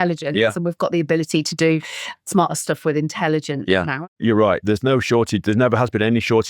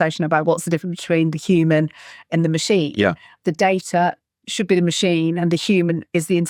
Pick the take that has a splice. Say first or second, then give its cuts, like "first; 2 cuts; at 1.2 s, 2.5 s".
first; 1 cut; at 3.9 s